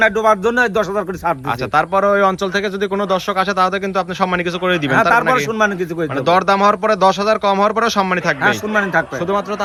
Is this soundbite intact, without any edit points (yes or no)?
yes